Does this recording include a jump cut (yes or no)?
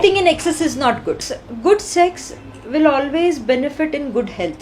yes